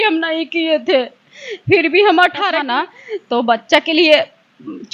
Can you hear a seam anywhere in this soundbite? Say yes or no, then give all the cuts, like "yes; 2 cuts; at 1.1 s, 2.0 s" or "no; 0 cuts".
yes; 1 cut; at 2.6 s